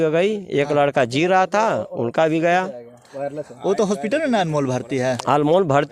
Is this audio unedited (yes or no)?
yes